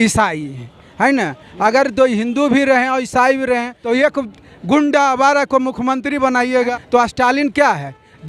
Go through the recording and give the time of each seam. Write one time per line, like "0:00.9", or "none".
0:03.8
0:06.7